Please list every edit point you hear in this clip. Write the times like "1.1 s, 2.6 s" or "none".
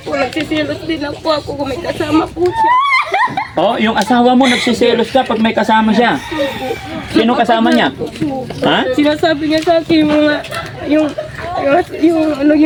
none